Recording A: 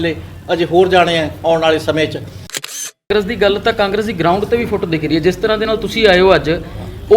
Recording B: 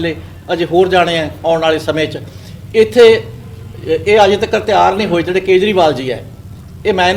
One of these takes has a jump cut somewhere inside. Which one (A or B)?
A